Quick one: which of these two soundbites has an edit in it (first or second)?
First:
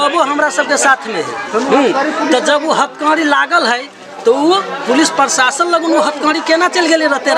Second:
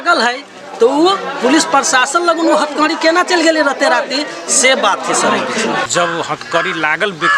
second